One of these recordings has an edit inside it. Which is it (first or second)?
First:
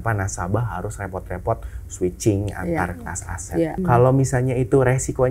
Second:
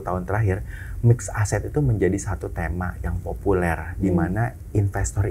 first